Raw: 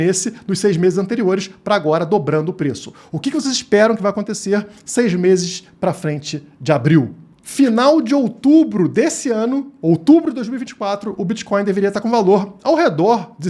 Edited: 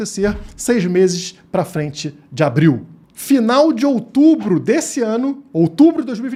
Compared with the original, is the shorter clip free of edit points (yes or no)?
yes